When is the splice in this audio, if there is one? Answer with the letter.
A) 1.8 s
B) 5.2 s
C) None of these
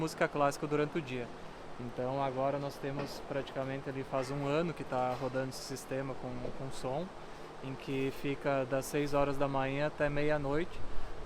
C